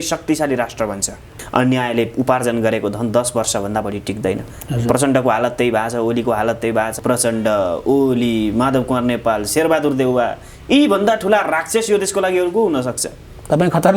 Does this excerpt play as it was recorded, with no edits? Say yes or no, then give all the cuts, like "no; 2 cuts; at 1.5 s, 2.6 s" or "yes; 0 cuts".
no; 2 cuts; at 1.3 s, 7.0 s